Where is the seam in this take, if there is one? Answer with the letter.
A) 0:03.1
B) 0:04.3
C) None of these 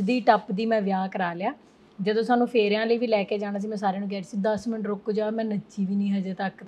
C